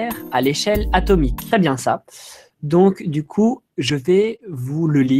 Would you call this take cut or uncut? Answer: uncut